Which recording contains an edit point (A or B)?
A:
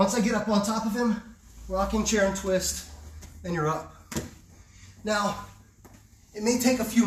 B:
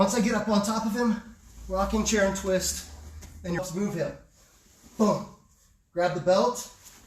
B